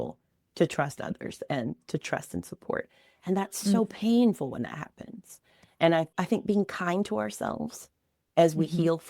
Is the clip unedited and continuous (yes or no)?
no